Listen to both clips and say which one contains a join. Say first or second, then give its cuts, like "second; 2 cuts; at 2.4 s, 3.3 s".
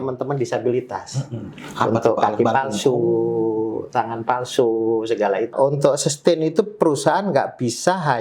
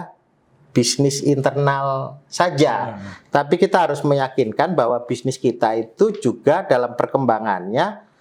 first; 1 cut; at 5.5 s